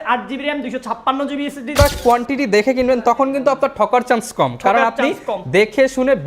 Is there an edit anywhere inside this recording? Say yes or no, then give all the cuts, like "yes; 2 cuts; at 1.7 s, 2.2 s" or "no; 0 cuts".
yes; 1 cut; at 1.8 s